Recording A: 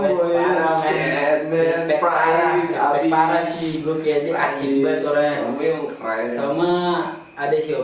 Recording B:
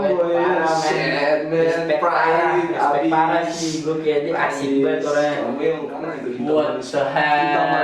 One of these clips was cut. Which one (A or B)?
B